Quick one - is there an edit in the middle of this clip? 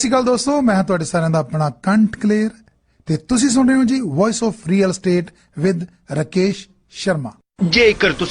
yes; 1 cut; at 7.4 s

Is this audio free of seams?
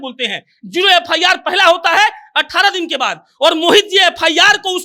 yes; 0 cuts

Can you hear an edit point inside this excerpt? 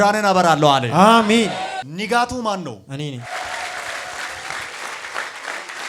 no; 0 cuts

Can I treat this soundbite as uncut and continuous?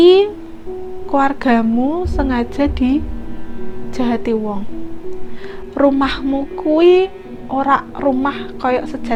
yes; 0 cuts

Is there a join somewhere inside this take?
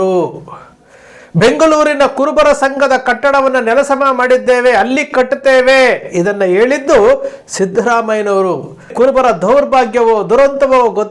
yes; 1 cut; at 8.9 s

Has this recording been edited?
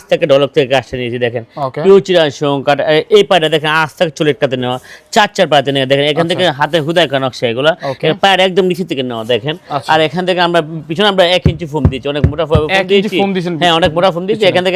no; 0 cuts

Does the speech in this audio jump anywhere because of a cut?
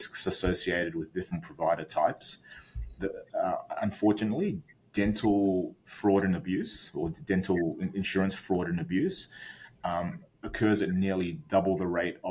no; 0 cuts

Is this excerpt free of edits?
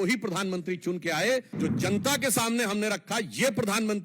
no; 1 cut; at 1.5 s

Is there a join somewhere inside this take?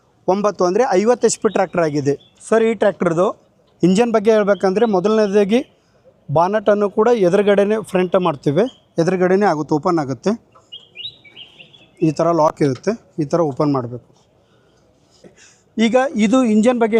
no; 0 cuts

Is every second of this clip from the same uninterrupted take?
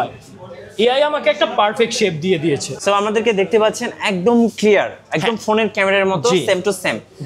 no; 1 cut; at 2.7 s

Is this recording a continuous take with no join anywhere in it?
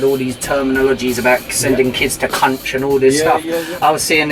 yes; 0 cuts

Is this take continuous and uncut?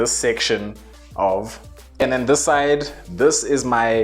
no; 1 cut; at 2.0 s

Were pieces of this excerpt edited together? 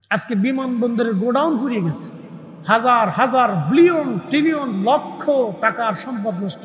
no; 0 cuts

